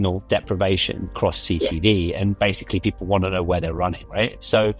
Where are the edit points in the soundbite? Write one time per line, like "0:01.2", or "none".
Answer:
0:01.1
0:02.4